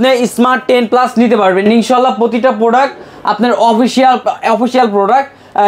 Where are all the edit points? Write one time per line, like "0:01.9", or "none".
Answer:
none